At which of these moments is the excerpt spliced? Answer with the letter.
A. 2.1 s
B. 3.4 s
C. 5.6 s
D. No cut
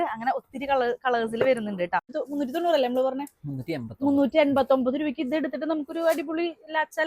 A